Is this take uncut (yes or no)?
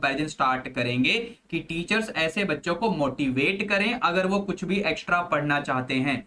yes